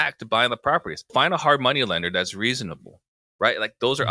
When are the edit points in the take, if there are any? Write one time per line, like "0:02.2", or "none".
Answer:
0:01.1